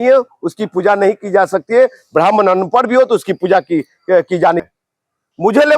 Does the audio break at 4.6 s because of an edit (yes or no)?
yes